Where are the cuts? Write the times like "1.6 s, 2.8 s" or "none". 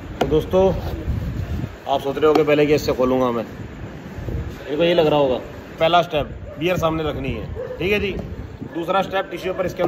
5.7 s

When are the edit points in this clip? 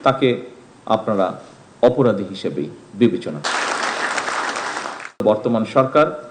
5.2 s

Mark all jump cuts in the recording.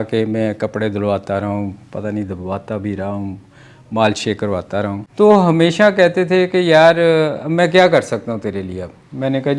5.0 s

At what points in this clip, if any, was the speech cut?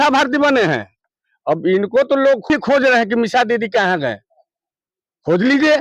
2.5 s

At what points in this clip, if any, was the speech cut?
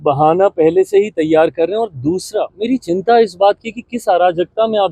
none

